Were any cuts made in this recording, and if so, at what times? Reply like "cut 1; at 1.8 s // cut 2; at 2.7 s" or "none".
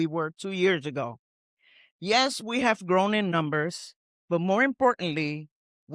none